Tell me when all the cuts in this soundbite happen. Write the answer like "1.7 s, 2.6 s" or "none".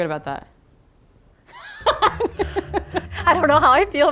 3.1 s

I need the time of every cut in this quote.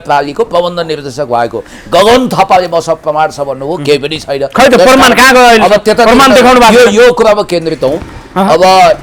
none

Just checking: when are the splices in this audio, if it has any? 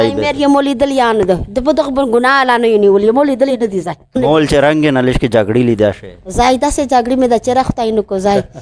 4.2 s

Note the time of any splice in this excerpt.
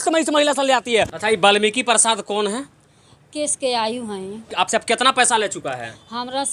1.1 s, 4.4 s

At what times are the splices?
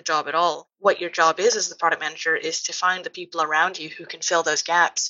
none

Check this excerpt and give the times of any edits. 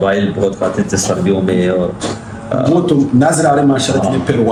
none

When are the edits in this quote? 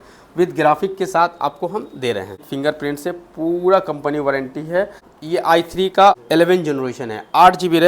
2.5 s, 5.1 s, 6.2 s

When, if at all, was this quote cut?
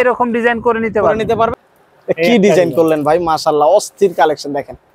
1.5 s

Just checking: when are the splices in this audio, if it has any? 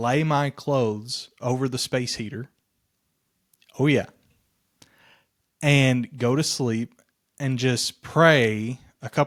none

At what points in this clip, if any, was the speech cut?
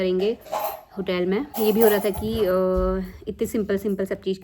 1.5 s

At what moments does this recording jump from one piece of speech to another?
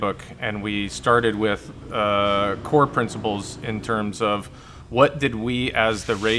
none

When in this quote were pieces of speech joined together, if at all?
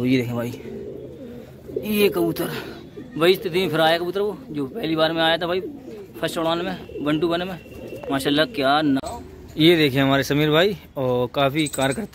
9.1 s

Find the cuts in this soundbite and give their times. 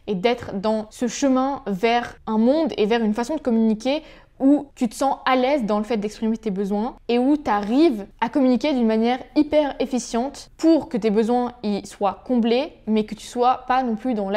none

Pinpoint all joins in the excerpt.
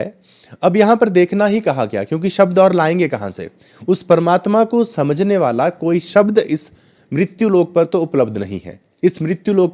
none

